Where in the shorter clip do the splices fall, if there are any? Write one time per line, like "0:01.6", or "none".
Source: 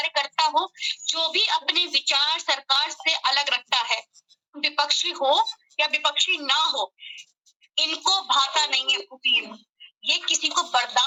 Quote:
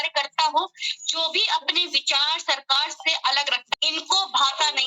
0:03.7